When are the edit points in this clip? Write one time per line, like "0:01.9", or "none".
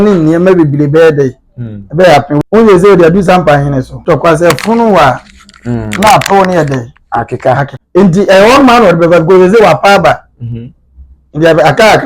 0:02.4
0:04.0
0:07.7